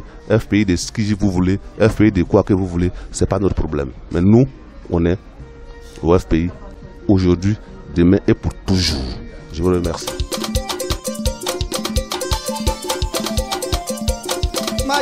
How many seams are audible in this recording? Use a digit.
1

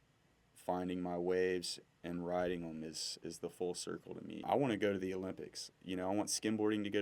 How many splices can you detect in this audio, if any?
1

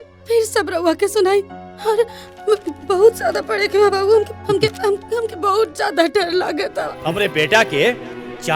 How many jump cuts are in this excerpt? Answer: 1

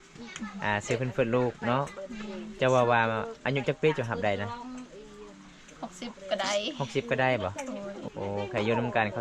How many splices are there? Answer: 1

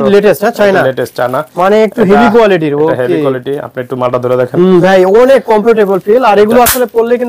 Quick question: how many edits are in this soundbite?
0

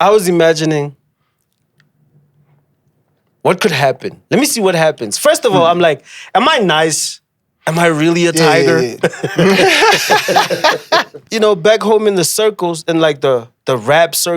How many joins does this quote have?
1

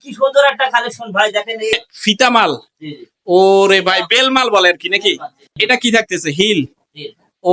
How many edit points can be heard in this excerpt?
2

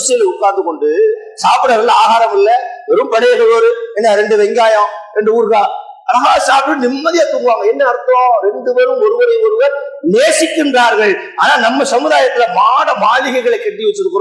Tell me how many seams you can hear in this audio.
0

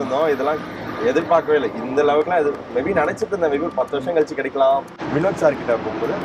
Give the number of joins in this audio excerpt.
1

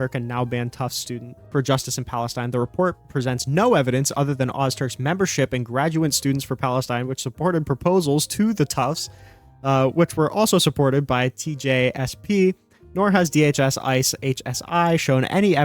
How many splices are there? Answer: 1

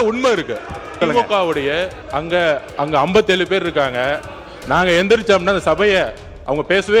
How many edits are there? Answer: 3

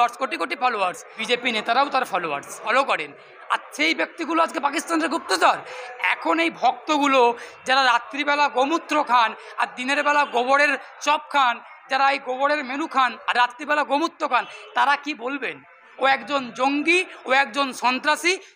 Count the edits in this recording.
3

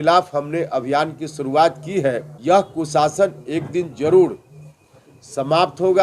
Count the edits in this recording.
1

